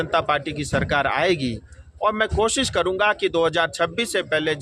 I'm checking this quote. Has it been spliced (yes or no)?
no